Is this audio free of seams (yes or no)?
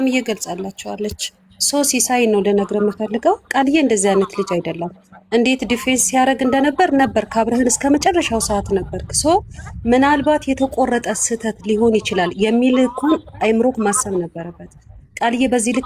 yes